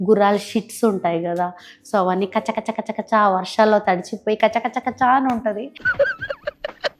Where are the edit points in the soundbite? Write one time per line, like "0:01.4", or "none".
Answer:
none